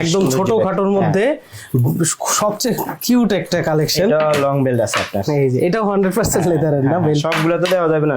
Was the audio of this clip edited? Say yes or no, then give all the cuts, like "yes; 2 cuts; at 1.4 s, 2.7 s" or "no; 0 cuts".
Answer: no; 0 cuts